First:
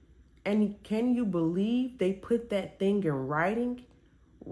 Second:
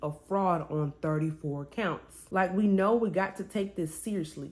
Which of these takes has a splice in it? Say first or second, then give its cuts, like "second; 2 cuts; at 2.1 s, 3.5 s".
second; 1 cut; at 2.1 s